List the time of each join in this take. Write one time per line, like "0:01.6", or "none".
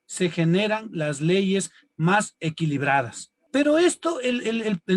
0:03.3